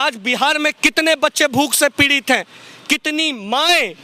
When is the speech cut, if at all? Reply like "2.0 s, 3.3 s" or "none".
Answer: none